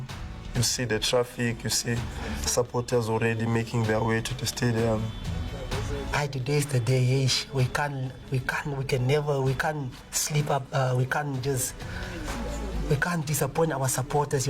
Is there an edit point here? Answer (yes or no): no